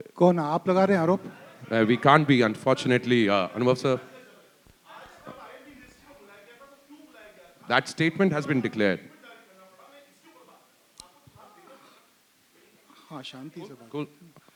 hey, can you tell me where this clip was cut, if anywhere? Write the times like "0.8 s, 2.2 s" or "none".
none